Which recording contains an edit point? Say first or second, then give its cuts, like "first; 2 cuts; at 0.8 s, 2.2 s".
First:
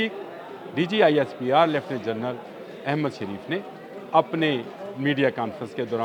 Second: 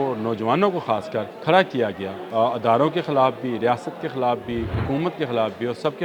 second; 3 cuts; at 1.3 s, 2.1 s, 4.8 s